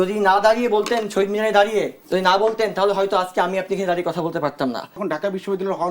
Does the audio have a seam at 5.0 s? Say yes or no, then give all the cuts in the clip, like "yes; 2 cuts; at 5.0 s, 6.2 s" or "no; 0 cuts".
yes; 1 cut; at 5.0 s